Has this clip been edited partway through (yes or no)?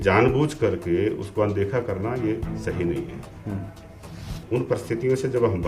no